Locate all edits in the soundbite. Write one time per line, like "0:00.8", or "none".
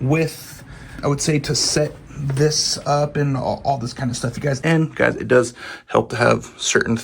0:01.0
0:04.6